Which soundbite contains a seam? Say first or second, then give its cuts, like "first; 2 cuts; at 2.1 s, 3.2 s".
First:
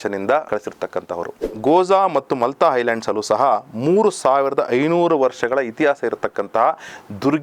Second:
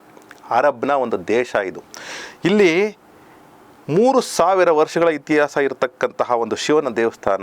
first; 1 cut; at 1.6 s